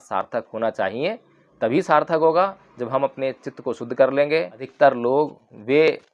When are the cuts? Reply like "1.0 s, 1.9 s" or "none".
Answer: 4.5 s